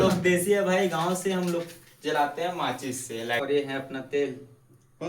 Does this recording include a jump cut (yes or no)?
yes